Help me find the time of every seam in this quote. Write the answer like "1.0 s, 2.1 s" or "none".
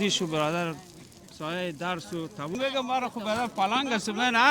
2.5 s